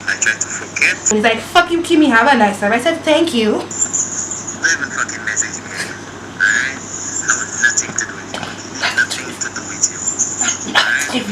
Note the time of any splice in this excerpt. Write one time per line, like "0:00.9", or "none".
0:01.1
0:03.8